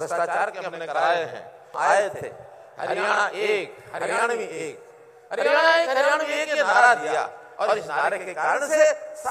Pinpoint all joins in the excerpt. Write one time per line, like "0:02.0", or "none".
0:01.7